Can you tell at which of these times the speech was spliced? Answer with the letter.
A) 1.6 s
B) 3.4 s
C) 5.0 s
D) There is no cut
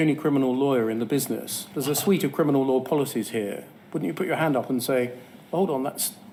D